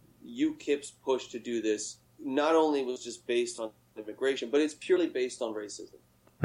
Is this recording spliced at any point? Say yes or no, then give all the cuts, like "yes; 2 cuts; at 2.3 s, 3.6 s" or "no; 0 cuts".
no; 0 cuts